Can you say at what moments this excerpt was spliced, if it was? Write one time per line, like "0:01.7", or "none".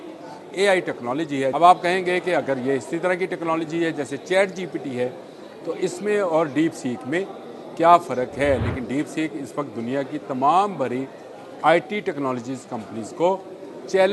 0:01.5